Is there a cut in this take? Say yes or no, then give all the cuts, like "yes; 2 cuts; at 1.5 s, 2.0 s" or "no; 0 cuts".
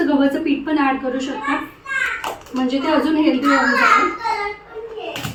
no; 0 cuts